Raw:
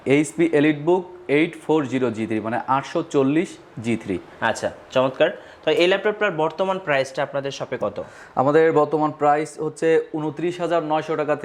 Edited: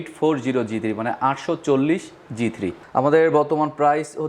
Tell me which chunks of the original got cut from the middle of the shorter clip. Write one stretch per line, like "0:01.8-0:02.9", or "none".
0:04.3-0:08.2